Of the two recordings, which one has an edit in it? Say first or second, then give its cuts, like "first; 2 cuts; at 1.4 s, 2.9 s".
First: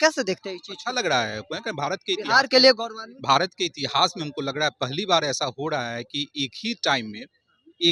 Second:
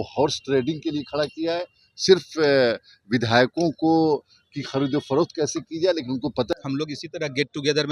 second; 1 cut; at 6.5 s